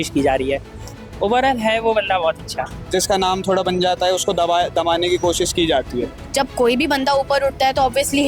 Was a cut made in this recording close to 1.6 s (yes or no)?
no